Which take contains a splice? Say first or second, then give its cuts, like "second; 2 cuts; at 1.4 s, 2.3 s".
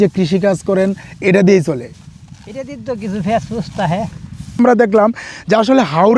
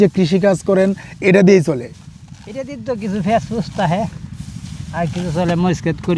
first; 1 cut; at 4.6 s